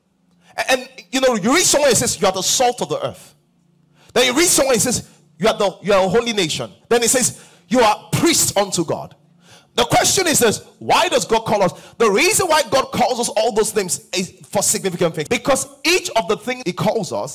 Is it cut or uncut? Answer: cut